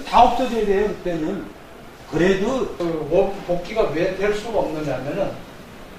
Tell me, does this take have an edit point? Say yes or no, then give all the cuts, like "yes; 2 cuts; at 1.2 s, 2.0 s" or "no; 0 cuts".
yes; 1 cut; at 2.7 s